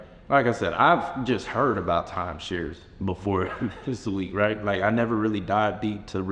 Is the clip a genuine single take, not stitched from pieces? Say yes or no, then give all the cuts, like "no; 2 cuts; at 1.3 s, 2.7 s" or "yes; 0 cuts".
yes; 0 cuts